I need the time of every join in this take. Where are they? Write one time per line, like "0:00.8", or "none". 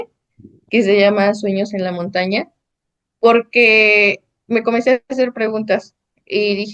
none